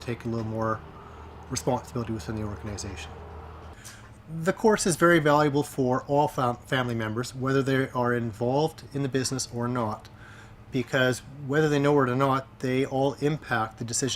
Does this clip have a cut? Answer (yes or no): yes